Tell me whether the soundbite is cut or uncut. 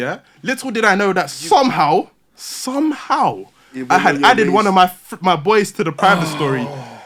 uncut